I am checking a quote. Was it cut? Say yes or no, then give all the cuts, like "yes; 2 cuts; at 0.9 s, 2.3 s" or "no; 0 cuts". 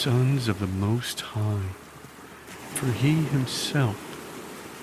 yes; 1 cut; at 3.9 s